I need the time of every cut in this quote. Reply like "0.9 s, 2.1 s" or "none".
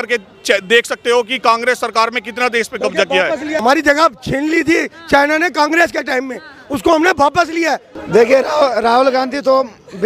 3.6 s, 7.9 s

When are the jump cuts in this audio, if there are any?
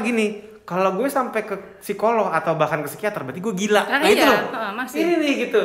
none

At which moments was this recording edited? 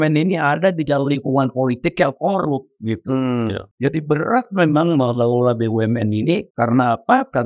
3.7 s, 6.5 s

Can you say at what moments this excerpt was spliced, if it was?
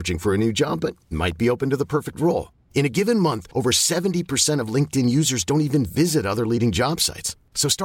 none

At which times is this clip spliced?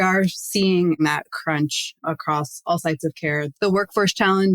1.0 s

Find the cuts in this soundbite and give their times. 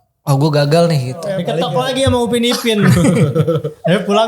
1.4 s

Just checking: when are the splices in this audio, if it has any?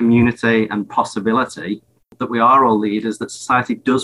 2.2 s

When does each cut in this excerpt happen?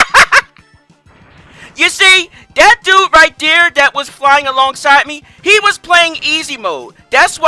none

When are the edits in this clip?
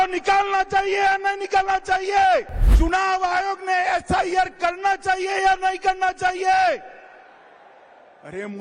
2.6 s

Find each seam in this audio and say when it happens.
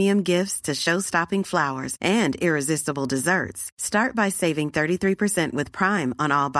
none

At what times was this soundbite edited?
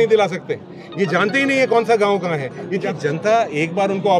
2.8 s

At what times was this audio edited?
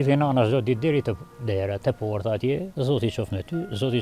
2.7 s

